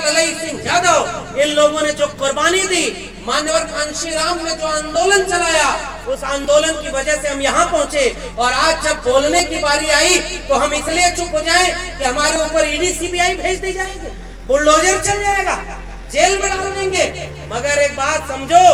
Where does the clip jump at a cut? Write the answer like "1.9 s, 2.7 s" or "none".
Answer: none